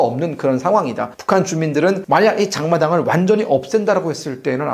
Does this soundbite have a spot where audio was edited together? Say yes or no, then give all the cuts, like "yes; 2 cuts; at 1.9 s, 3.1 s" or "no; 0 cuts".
no; 0 cuts